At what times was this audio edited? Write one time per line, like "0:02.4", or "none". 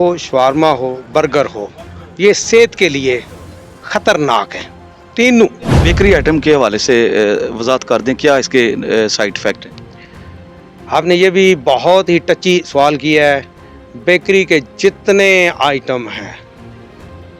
0:05.8